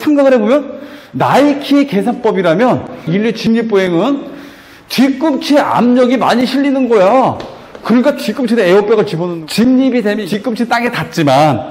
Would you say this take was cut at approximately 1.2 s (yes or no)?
no